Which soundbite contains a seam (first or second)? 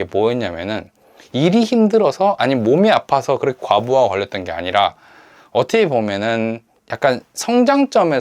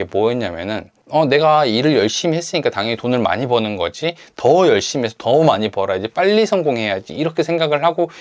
second